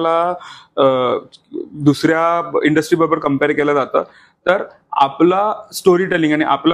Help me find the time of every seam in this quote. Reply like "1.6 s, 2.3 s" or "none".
none